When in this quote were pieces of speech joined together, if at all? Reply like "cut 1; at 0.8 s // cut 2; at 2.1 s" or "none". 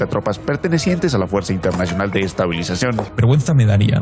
cut 1; at 3.1 s